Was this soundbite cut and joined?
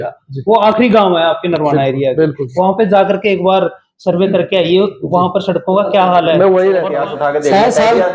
yes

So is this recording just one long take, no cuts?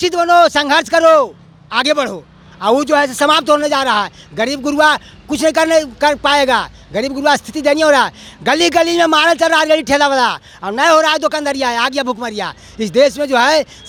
yes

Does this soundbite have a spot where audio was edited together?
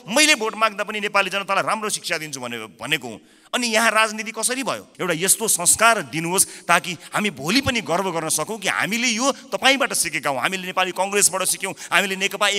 yes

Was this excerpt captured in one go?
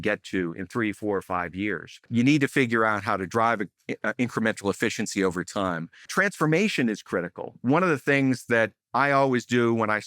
no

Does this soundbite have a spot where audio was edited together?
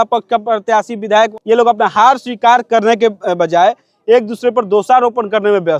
yes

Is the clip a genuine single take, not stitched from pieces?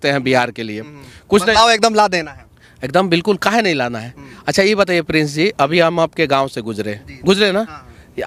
yes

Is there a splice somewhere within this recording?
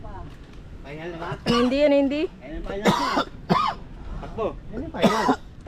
no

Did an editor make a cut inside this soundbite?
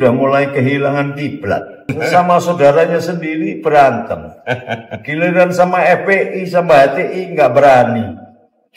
yes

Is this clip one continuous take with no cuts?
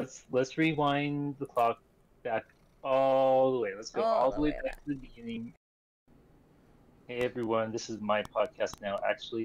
no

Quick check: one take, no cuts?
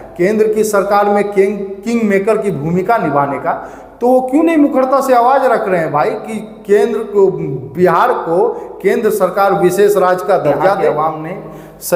no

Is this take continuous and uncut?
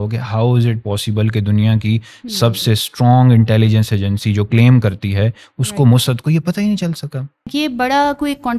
no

